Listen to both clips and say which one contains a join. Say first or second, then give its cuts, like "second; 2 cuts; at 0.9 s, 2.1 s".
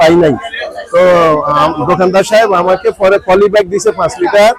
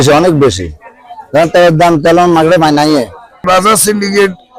second; 1 cut; at 3.4 s